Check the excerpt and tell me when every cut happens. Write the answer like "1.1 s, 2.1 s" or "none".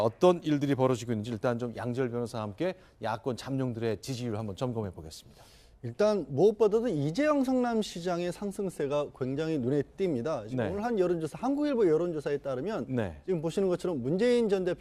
none

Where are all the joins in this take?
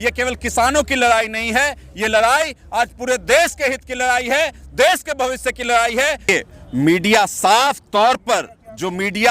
6.3 s

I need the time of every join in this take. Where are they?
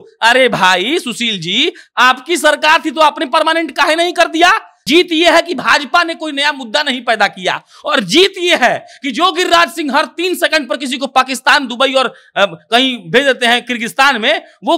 4.7 s

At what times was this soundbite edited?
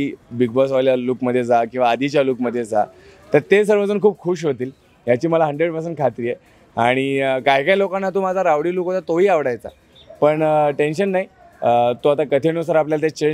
none

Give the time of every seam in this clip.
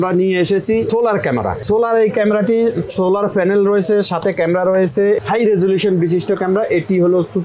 1.1 s, 5.2 s

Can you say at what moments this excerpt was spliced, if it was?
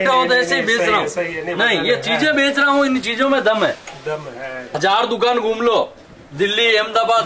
4.8 s

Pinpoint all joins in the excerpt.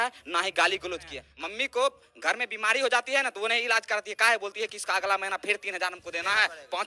1.2 s

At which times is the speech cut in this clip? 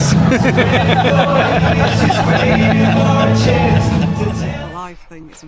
4.5 s

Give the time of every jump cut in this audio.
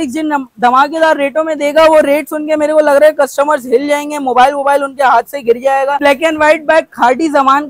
6.0 s

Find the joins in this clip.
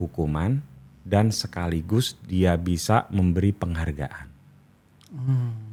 none

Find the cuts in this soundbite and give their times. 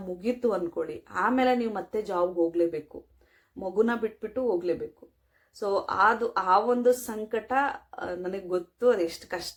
none

